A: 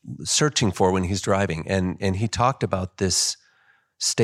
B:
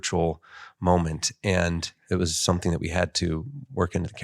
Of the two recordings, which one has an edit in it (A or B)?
B